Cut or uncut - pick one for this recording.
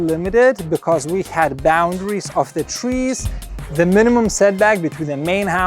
cut